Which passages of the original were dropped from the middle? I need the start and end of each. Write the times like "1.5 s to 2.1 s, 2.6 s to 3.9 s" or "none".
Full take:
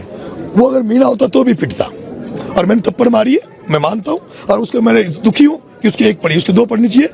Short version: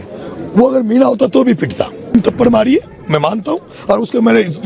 2.1 s to 2.7 s